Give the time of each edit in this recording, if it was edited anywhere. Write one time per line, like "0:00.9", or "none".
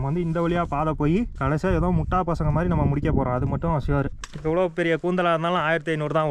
0:01.3
0:04.2